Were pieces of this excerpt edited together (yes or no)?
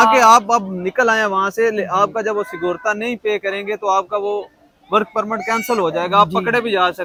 no